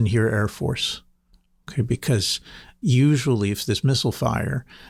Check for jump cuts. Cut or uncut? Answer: uncut